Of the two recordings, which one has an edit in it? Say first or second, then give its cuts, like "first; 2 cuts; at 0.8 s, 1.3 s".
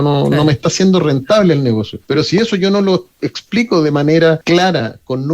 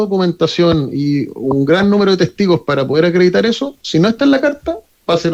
first; 2 cuts; at 1.9 s, 4.4 s